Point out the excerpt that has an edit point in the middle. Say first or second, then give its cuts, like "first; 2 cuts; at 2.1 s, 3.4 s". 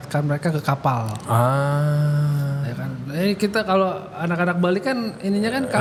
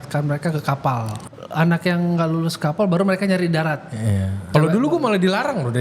second; 2 cuts; at 1.1 s, 4.4 s